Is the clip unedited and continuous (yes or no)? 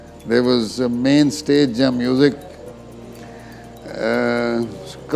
yes